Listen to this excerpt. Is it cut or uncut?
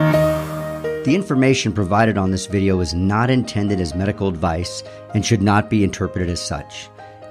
cut